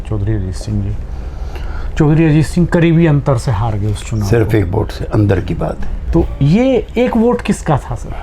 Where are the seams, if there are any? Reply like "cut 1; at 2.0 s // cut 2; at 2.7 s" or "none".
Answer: cut 1; at 5.9 s